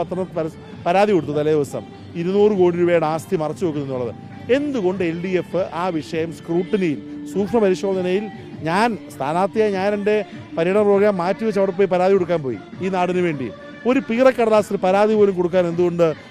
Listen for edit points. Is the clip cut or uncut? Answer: uncut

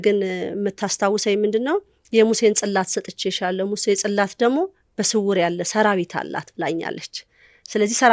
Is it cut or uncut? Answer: uncut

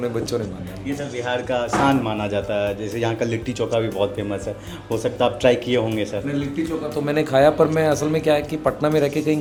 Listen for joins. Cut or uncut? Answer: uncut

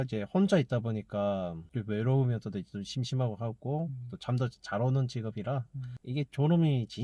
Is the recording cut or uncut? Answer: uncut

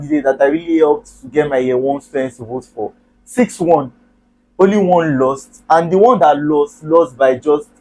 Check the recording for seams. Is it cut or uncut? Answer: uncut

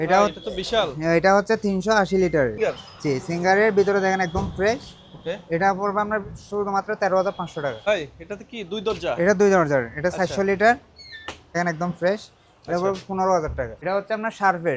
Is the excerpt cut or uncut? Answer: cut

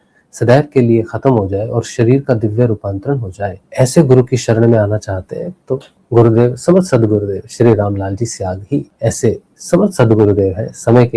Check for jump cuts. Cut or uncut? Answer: cut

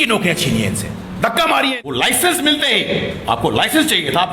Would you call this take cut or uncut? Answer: cut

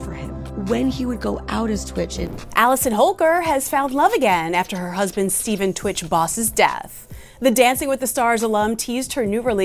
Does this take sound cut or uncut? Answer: cut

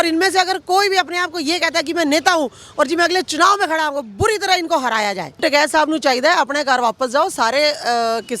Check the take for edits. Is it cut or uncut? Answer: cut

